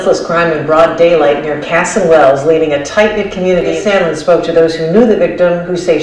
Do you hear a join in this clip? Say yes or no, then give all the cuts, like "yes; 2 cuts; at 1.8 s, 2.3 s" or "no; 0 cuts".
yes; 1 cut; at 3.8 s